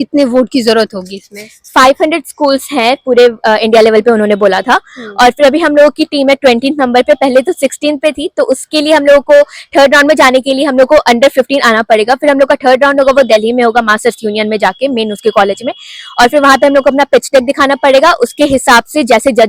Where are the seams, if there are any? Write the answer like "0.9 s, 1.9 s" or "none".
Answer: none